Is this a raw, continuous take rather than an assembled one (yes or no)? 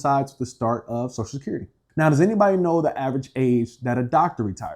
no